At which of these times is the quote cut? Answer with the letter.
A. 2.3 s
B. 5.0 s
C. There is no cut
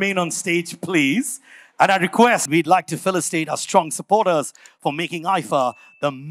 A